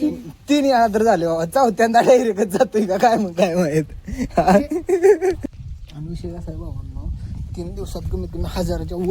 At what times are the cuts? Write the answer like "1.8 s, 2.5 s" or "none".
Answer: 5.5 s

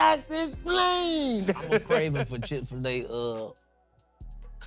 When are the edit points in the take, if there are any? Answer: 2.1 s

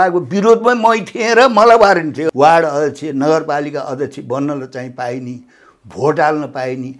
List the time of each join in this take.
2.2 s

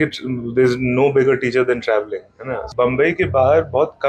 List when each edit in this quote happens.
2.7 s

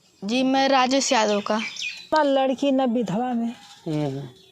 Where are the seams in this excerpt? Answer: 2.1 s

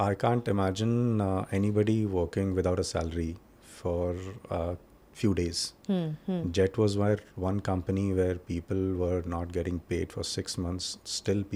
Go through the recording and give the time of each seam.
none

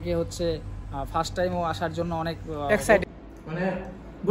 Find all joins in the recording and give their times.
3.1 s

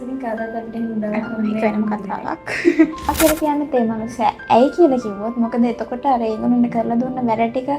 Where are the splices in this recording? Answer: 3.1 s

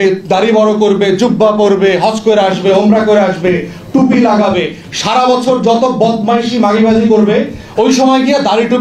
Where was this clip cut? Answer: none

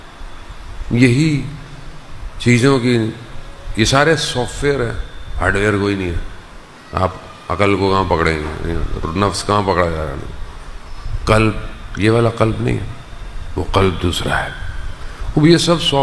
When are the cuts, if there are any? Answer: none

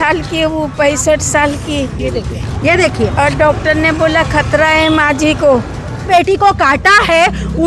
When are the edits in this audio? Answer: 6.1 s

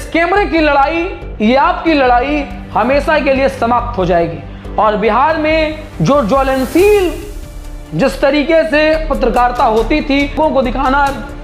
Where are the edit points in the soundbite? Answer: 10.4 s

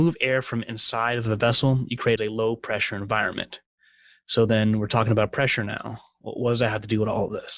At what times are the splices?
2.2 s

